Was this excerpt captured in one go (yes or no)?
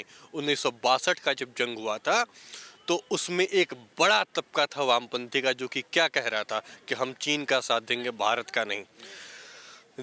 yes